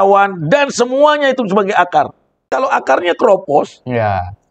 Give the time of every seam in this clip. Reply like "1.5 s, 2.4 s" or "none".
2.5 s